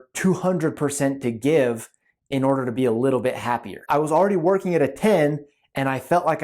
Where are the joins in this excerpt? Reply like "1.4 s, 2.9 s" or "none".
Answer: 3.9 s